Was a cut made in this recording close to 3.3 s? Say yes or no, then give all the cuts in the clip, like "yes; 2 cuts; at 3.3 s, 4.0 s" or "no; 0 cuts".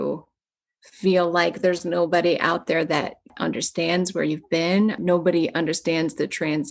yes; 2 cuts; at 3.3 s, 5.0 s